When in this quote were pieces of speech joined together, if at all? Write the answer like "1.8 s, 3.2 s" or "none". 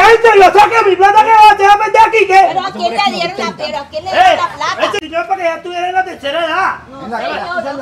5.0 s